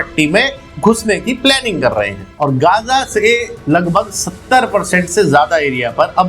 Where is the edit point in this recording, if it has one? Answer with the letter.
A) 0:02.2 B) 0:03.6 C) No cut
A